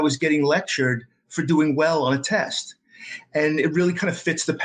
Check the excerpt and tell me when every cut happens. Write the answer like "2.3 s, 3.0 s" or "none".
none